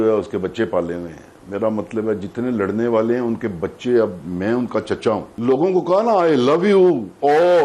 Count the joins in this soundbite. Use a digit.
1